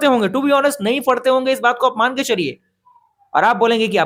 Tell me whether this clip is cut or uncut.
uncut